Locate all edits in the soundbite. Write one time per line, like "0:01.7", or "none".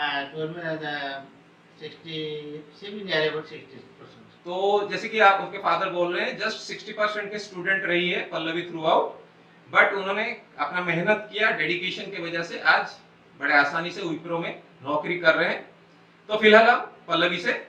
none